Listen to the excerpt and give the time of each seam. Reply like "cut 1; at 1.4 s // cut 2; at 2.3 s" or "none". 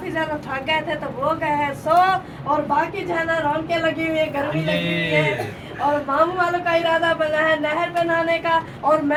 none